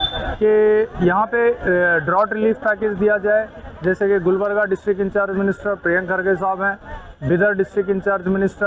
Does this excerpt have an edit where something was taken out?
no; 0 cuts

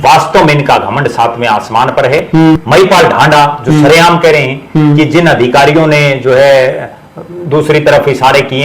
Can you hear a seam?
yes; 1 cut; at 2.6 s

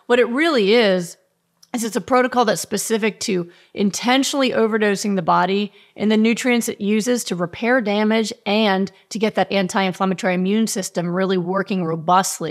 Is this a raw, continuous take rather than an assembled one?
yes; 0 cuts

